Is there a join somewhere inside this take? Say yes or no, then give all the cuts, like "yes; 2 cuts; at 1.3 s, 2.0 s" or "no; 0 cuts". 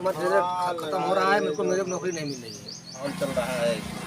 yes; 1 cut; at 3.0 s